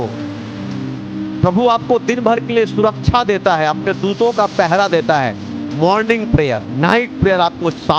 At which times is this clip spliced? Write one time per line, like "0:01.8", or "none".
0:06.7